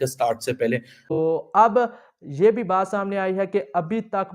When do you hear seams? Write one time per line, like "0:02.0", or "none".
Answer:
0:01.0